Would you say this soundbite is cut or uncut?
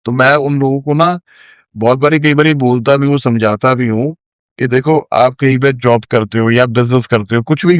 uncut